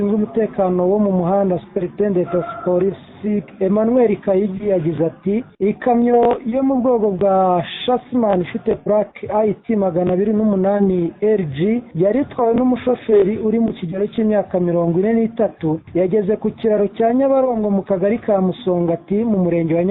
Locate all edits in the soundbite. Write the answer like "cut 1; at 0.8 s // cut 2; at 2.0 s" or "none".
cut 1; at 3.5 s // cut 2; at 5.5 s // cut 3; at 11.9 s // cut 4; at 15.8 s

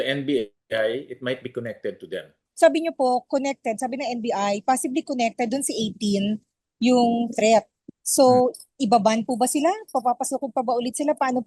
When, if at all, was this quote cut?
cut 1; at 2.4 s

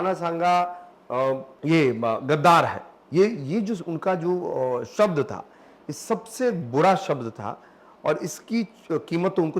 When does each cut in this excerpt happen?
cut 1; at 1.5 s

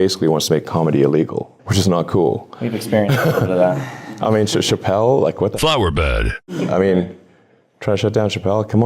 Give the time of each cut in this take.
cut 1; at 1.6 s

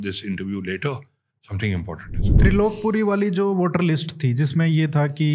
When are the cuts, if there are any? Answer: cut 1; at 2.4 s

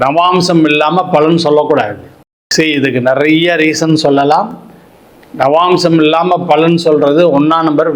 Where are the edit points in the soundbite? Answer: cut 1; at 2.4 s

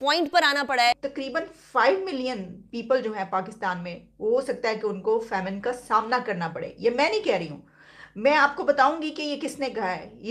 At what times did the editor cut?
cut 1; at 1.0 s

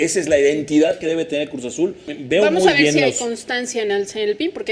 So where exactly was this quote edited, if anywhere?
cut 1; at 2.1 s

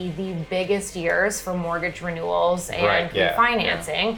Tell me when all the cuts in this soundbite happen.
none

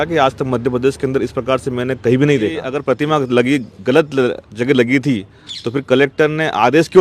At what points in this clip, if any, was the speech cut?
cut 1; at 2.7 s

